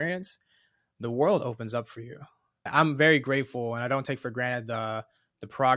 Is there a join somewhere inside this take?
yes; 1 cut; at 2.7 s

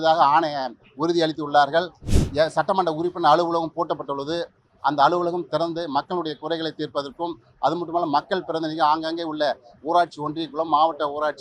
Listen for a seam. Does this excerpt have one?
yes; 1 cut; at 2.0 s

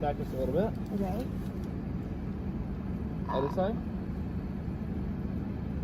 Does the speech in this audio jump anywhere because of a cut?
no; 0 cuts

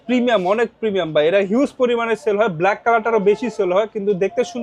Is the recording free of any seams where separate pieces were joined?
yes; 0 cuts

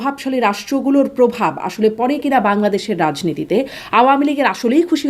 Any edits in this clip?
no; 0 cuts

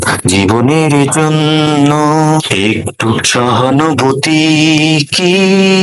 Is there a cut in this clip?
no; 0 cuts

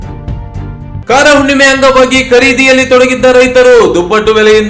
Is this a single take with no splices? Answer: no; 1 cut; at 1.0 s

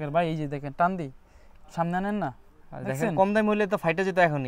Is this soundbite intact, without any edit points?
yes; 0 cuts

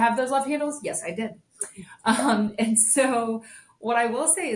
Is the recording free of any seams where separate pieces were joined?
yes; 0 cuts

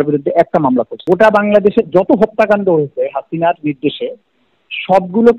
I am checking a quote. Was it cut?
yes; 1 cut; at 0.9 s

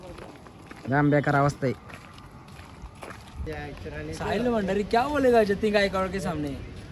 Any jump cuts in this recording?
yes; 1 cut; at 3.4 s

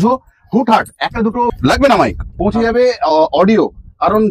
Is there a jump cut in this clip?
yes; 1 cut; at 1.5 s

